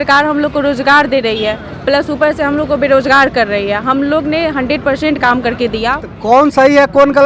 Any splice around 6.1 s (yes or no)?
yes